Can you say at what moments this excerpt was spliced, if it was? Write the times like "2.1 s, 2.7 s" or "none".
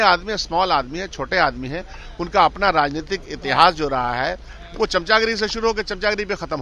none